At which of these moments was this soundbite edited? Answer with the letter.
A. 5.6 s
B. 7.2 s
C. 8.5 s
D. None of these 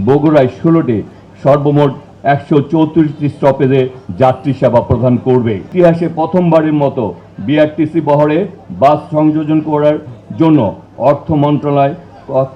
A